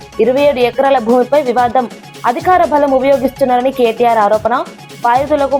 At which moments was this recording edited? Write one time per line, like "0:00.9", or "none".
none